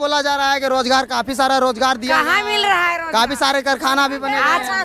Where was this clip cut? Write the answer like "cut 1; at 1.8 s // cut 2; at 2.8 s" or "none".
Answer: none

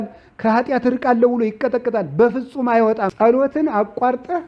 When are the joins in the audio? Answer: cut 1; at 3.1 s

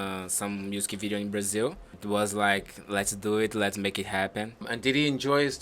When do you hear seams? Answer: cut 1; at 1.9 s // cut 2; at 4.7 s

